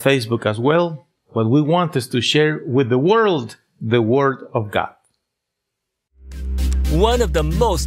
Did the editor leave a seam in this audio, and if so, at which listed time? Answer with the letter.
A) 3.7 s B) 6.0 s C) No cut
B